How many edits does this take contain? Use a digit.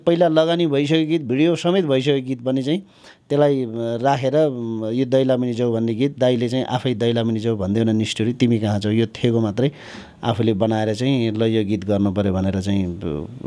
0